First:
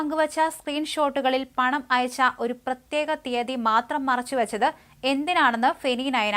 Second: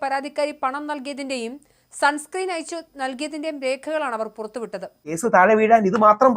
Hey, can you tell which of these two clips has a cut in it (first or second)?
second